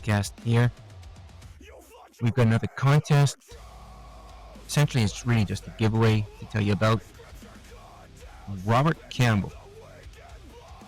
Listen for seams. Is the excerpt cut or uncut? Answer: uncut